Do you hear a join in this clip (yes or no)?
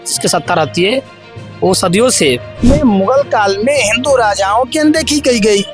yes